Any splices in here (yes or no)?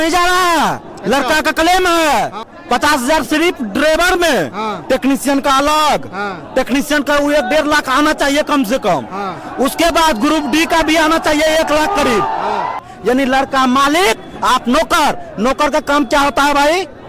yes